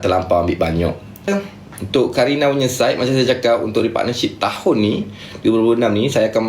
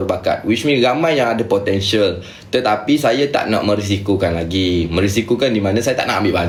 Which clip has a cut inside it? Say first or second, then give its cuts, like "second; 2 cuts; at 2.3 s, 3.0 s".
first; 1 cut; at 1.3 s